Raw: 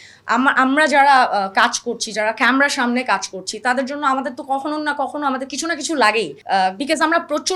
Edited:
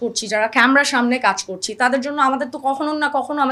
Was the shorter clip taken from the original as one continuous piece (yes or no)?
yes